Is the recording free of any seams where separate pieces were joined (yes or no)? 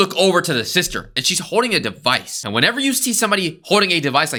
yes